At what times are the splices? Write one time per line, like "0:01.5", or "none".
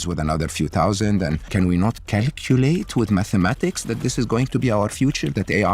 none